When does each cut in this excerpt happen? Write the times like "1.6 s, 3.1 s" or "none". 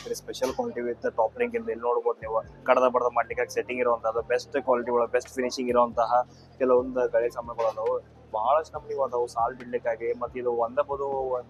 none